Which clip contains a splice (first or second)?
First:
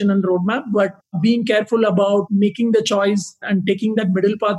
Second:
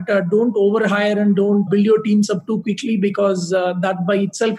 first